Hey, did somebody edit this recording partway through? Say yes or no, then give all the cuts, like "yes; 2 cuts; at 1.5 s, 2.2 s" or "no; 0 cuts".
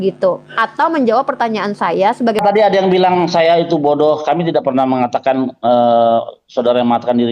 yes; 1 cut; at 2.4 s